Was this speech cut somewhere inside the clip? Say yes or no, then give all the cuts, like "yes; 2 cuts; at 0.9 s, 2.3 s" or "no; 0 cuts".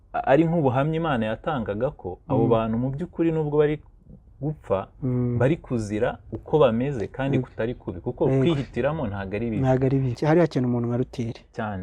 yes; 1 cut; at 10.2 s